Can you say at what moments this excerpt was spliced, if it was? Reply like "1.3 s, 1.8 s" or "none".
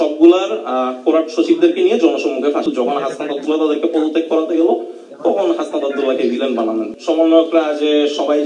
2.6 s, 6.9 s